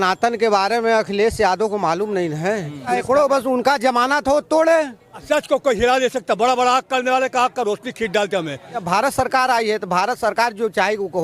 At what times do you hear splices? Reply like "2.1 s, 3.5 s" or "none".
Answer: 2.9 s, 5.2 s, 8.8 s